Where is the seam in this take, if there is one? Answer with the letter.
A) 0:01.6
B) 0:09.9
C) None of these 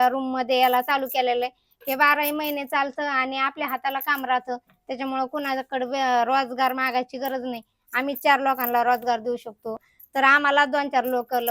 B